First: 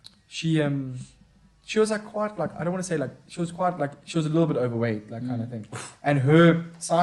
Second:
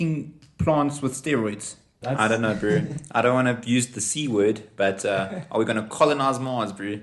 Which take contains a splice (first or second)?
second